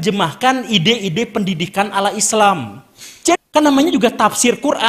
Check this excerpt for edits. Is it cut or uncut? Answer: cut